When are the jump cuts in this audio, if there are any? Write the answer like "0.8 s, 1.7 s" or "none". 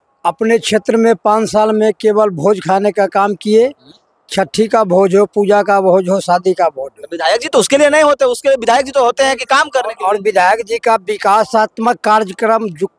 none